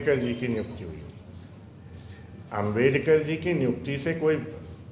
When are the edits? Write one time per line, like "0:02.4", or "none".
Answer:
none